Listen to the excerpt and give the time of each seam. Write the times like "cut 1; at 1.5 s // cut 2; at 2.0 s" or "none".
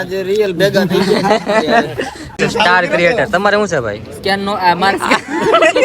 cut 1; at 2.3 s